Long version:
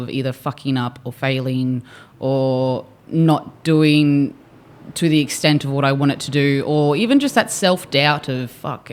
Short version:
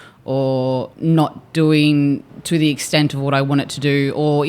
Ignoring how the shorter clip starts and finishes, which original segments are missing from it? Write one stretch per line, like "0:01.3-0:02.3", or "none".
0:02.9-0:03.0
0:04.4-0:04.8